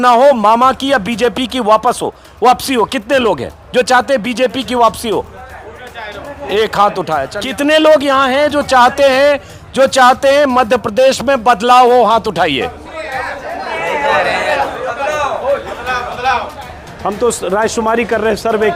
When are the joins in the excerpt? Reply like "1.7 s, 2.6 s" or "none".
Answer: 7.3 s, 16.6 s